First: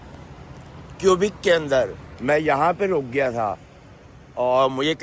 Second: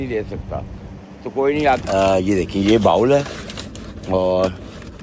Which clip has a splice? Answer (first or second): second